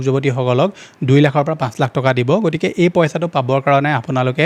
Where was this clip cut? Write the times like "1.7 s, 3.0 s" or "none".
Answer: none